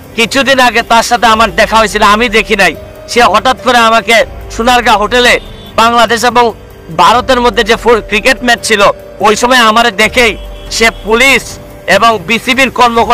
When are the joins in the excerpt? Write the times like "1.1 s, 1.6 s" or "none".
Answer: none